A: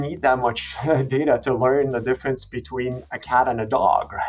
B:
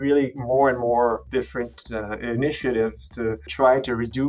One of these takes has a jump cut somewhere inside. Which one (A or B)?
B